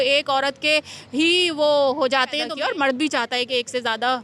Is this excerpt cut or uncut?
cut